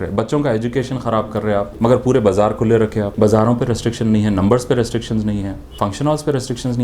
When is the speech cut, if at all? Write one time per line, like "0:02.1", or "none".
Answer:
0:01.7
0:03.1
0:05.6